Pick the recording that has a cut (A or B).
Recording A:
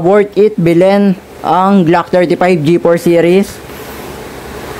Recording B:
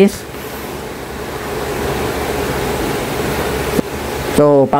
B